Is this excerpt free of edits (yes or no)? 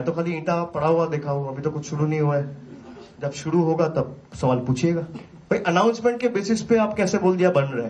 yes